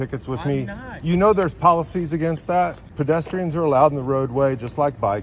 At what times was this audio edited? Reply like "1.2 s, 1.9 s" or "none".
2.8 s